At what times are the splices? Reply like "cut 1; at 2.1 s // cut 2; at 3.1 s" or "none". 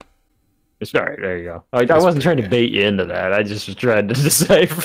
none